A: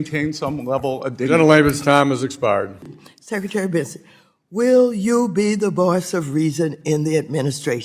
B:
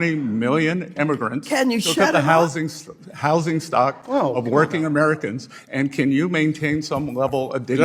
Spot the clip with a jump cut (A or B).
A